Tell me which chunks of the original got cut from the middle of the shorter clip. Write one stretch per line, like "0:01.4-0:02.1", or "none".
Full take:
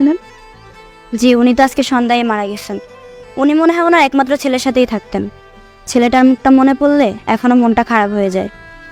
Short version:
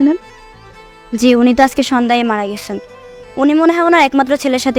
none